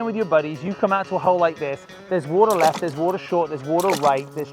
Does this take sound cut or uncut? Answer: uncut